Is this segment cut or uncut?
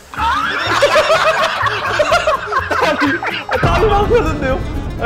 uncut